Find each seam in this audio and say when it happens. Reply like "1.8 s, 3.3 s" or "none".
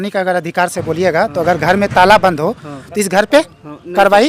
none